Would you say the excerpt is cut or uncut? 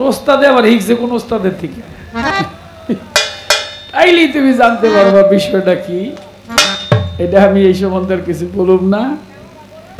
uncut